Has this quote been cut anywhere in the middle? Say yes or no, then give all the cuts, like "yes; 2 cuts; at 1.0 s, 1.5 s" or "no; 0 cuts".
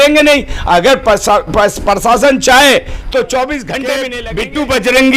yes; 1 cut; at 4.2 s